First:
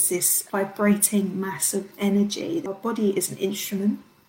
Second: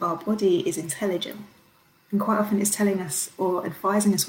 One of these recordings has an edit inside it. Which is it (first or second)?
first